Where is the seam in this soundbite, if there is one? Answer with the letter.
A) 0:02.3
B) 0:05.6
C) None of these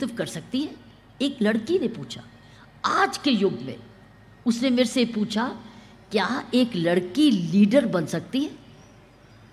C